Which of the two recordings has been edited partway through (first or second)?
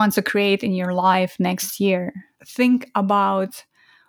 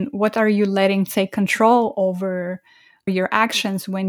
first